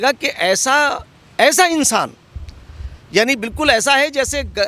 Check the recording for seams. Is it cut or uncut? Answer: uncut